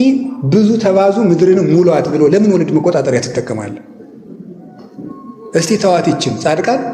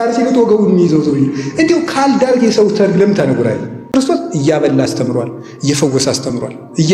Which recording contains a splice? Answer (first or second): second